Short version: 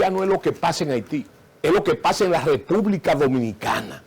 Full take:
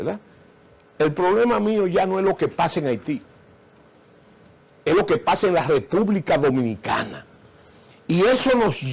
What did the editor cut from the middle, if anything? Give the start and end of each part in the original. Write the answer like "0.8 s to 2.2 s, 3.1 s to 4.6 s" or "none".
3.4 s to 4.6 s